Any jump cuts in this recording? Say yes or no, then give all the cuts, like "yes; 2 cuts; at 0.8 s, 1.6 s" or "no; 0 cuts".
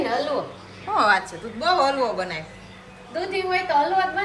no; 0 cuts